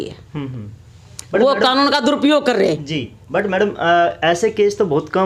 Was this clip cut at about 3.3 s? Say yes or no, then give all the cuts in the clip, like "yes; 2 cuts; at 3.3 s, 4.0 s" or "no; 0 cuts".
no; 0 cuts